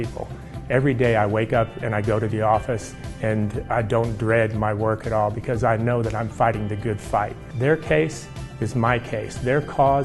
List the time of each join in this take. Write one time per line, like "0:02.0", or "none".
0:07.4